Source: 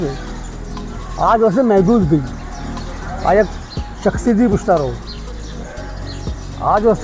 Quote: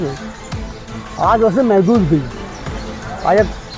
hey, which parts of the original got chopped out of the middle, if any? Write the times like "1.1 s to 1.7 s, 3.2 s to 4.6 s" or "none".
none